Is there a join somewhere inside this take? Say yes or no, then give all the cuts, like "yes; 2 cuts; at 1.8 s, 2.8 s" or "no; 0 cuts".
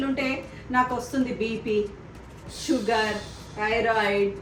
no; 0 cuts